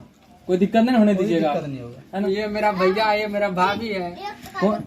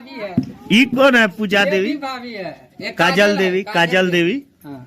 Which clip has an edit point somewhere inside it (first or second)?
first